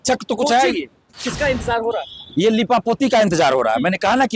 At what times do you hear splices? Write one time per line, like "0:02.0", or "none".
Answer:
0:01.2